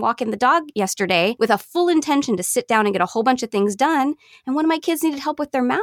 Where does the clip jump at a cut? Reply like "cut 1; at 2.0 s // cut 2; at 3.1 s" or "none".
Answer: cut 1; at 1.1 s